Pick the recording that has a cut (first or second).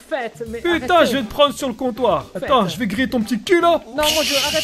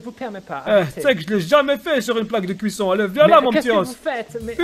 first